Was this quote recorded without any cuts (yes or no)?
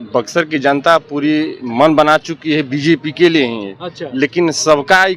yes